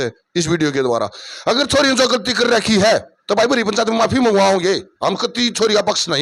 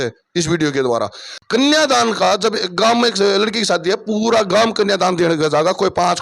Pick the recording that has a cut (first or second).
second